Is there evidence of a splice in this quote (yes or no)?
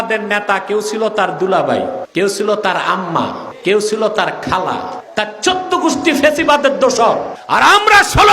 yes